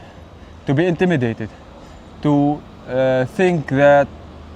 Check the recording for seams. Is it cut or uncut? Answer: uncut